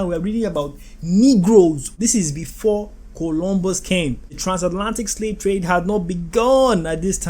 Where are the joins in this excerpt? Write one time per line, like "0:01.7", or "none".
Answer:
0:01.9